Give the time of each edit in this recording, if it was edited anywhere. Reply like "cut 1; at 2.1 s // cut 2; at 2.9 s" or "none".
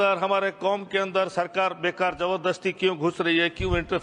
none

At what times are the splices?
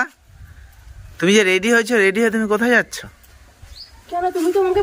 none

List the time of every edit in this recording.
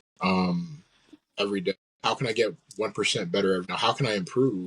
cut 1; at 1.9 s // cut 2; at 3.7 s

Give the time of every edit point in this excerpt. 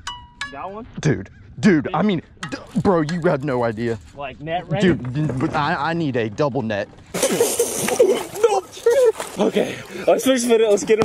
cut 1; at 7.1 s // cut 2; at 9.3 s

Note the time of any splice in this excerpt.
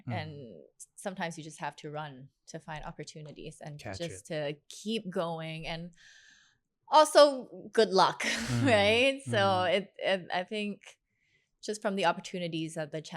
none

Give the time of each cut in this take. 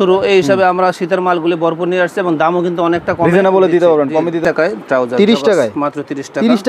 cut 1; at 4.4 s

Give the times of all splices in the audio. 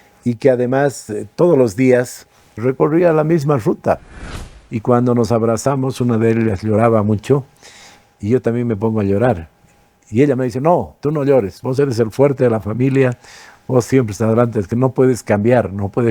cut 1; at 4.1 s

